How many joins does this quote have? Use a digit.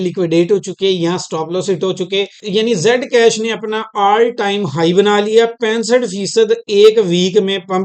1